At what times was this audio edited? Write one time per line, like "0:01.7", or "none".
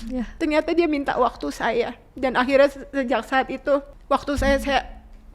0:03.9